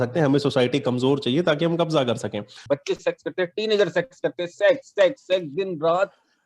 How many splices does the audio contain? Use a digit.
1